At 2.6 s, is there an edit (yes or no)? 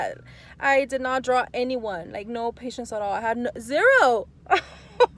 no